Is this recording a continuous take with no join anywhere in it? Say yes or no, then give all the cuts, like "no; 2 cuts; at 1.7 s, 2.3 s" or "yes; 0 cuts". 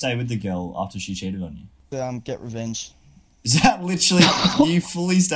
yes; 0 cuts